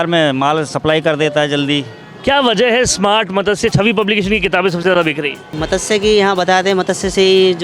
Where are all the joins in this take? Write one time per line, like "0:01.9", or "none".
0:02.1
0:05.5